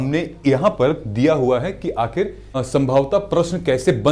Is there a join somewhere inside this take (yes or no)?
yes